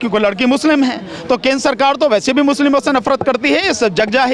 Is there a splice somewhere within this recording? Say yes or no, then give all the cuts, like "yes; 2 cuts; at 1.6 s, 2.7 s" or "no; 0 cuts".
no; 0 cuts